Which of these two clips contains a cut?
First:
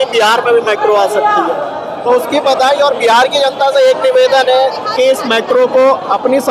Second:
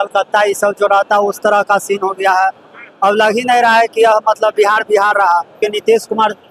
second; 1 cut; at 5.6 s

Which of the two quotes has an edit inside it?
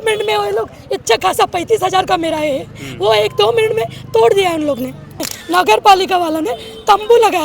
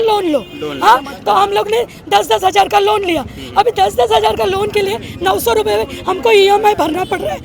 first; 1 cut; at 5.3 s

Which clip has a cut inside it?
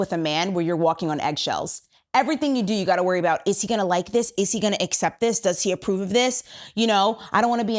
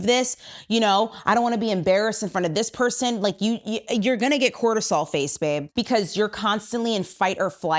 second; 1 cut; at 5.7 s

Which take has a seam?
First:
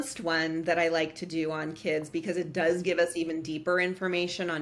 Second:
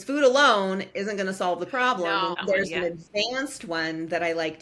second; 1 cut; at 2.2 s

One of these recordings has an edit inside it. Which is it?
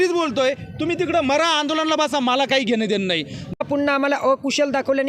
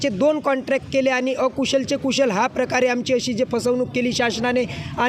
first; 1 cut; at 3.6 s

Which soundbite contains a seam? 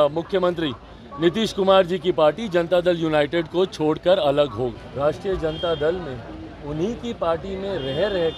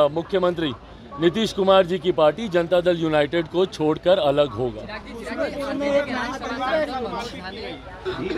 first; 1 cut; at 4.8 s

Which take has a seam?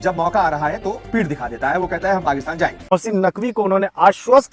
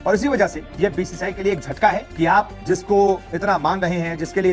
first; 1 cut; at 2.9 s

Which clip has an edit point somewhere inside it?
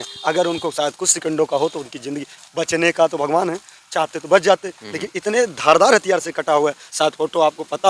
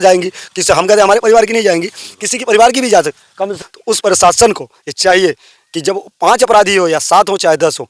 second; 1 cut; at 3.6 s

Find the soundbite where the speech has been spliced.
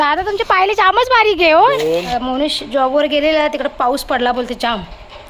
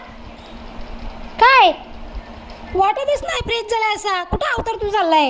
first; 1 cut; at 2.1 s

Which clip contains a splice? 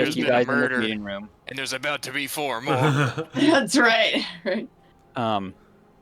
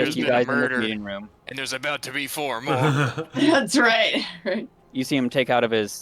second; 1 cut; at 4.8 s

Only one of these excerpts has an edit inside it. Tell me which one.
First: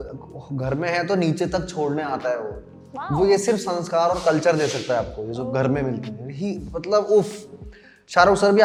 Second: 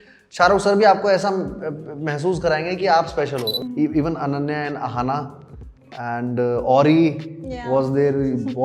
second; 1 cut; at 3.5 s

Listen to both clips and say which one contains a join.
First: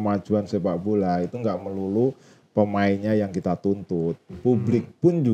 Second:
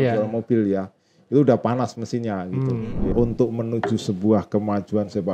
second; 1 cut; at 3.1 s

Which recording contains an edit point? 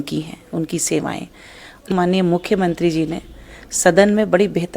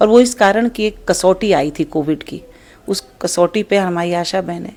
first; 1 cut; at 1.9 s

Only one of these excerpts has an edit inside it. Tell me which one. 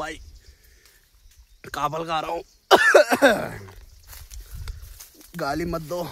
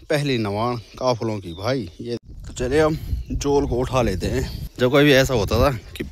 second; 2 cuts; at 2.2 s, 4.6 s

